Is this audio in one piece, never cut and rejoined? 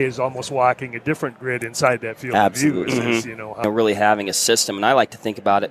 no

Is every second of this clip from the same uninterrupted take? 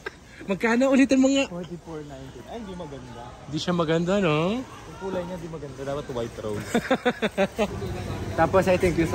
no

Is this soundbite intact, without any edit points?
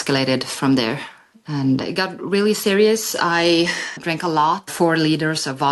yes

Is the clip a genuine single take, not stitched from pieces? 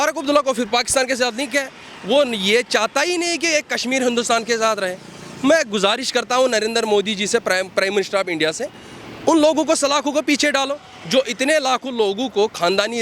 yes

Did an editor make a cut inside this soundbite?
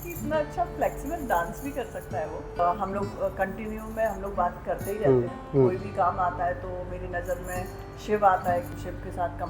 yes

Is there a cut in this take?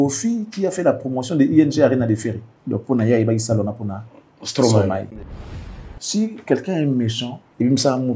yes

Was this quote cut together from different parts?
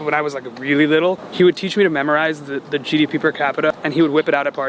yes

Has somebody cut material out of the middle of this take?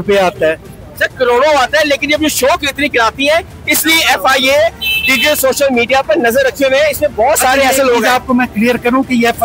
no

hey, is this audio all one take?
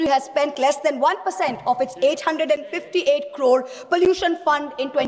yes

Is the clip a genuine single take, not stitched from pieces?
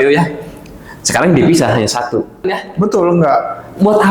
no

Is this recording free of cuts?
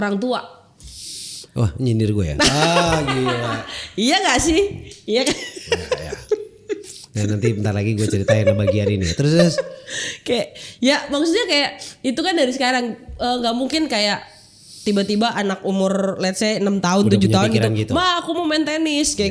yes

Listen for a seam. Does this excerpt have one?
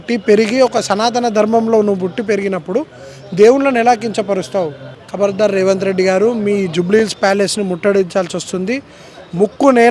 no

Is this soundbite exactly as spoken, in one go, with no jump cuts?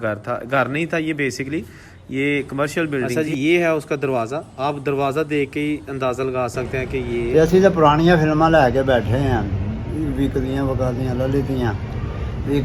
no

